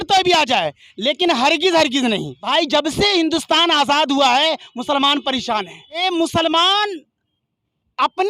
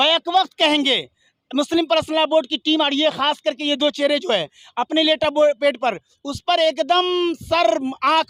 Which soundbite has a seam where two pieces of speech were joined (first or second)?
first